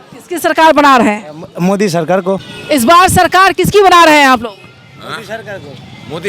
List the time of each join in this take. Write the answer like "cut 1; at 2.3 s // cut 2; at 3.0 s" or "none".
cut 1; at 2.5 s